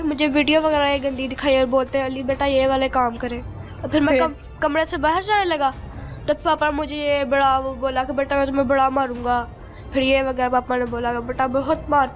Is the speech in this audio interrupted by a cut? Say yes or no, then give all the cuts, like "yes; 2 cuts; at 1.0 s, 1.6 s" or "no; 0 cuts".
no; 0 cuts